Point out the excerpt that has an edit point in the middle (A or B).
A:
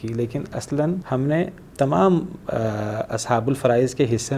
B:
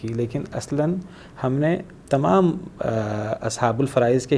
A